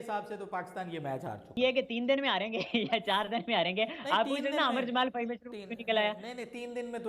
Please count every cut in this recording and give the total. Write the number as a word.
one